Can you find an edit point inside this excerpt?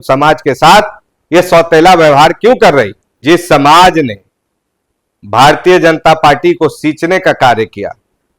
yes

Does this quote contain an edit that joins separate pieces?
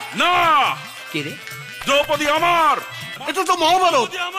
yes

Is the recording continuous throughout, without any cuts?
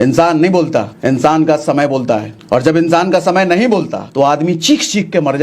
no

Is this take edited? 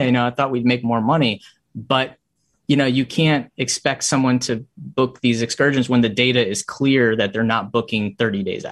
no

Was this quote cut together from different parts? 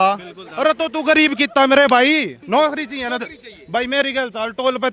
yes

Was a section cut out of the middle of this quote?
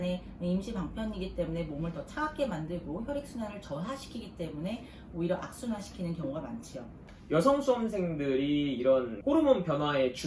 yes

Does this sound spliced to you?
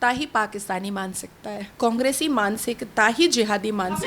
yes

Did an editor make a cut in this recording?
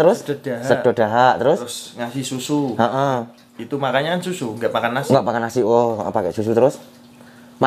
no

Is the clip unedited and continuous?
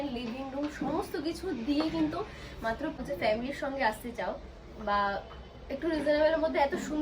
no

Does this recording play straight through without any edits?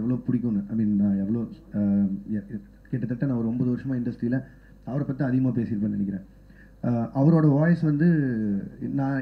yes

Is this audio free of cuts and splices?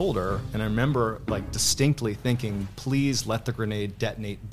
yes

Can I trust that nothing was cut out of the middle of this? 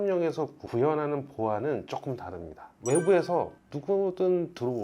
yes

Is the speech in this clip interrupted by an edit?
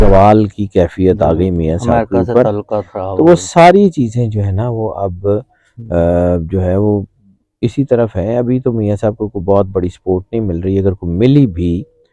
no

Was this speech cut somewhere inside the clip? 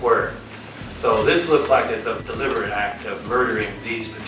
yes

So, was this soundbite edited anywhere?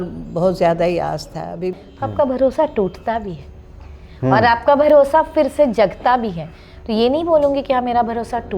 yes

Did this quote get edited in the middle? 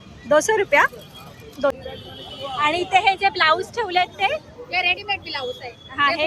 yes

